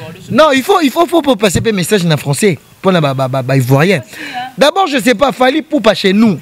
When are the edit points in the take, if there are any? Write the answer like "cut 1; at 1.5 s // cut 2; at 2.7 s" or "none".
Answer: none